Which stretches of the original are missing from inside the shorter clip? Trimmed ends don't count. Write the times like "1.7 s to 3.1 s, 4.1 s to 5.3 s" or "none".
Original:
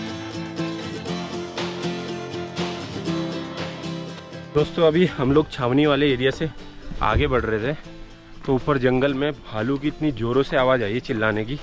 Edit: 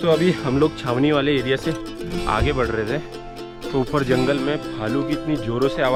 none